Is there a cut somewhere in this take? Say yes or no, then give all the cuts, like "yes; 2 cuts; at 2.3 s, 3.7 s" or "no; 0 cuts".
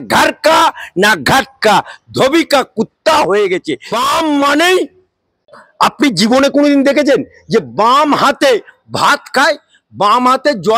yes; 1 cut; at 3.8 s